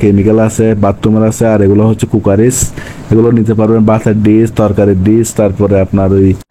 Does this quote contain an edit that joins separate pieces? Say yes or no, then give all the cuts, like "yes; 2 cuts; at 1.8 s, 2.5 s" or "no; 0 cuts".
no; 0 cuts